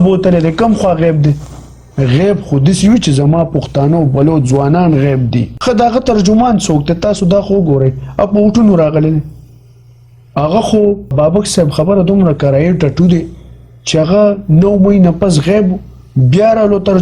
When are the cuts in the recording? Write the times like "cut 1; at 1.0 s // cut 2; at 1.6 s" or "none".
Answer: cut 1; at 5.5 s // cut 2; at 11.1 s